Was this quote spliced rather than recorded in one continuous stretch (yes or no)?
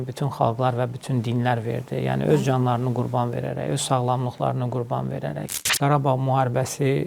yes